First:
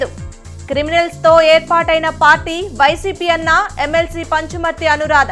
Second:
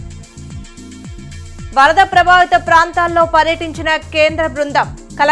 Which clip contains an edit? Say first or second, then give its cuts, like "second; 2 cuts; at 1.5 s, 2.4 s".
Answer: second; 1 cut; at 1.0 s